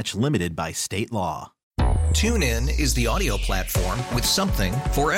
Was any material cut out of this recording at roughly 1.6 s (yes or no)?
yes